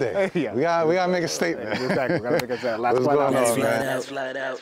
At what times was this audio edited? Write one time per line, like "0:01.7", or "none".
none